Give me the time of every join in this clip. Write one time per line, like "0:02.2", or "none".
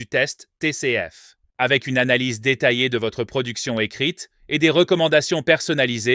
none